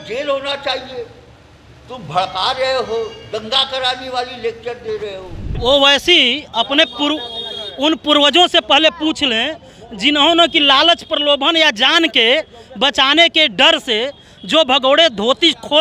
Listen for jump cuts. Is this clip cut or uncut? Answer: cut